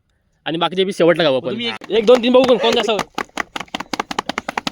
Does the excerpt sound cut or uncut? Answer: cut